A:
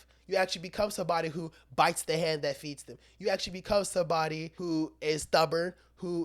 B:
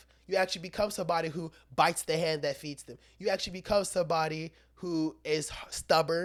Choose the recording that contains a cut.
A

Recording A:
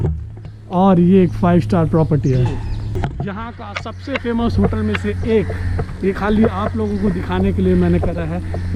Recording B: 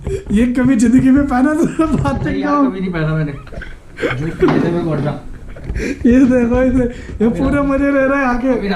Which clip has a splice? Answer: A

